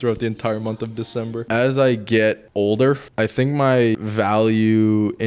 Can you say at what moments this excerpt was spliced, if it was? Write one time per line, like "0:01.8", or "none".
0:01.4
0:02.4
0:03.1
0:04.0